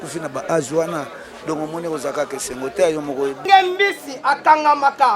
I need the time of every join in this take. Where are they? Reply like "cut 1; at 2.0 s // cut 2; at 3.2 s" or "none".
cut 1; at 3.4 s